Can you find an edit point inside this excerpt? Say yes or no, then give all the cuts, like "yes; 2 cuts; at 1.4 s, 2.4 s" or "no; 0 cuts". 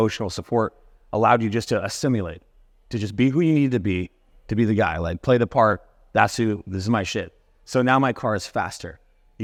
no; 0 cuts